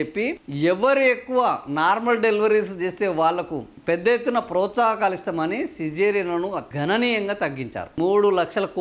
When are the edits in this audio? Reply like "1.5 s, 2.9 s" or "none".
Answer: 6.7 s, 8.0 s

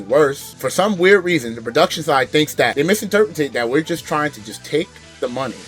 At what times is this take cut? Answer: none

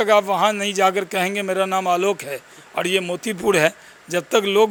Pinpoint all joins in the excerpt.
none

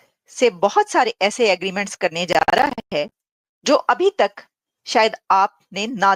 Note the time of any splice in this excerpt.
none

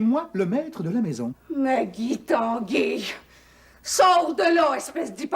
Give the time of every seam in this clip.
1.4 s

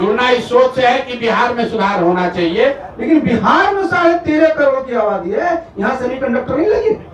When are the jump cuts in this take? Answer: 2.8 s

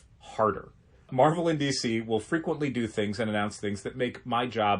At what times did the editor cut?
1.1 s

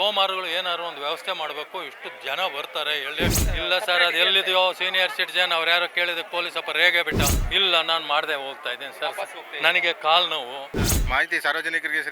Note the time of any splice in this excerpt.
3.4 s, 7.4 s, 11.0 s

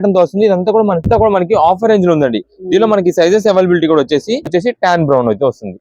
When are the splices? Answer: 1.2 s, 4.5 s

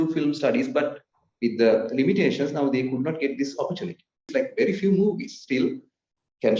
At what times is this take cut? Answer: 4.3 s

